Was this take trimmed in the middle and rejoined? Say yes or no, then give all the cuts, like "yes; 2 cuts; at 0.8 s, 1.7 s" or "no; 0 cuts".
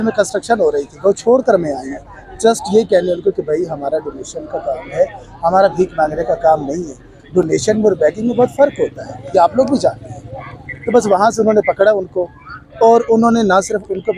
no; 0 cuts